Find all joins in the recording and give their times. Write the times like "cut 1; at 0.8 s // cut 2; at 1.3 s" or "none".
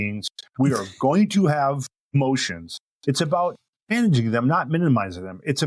cut 1; at 2.1 s // cut 2; at 3.9 s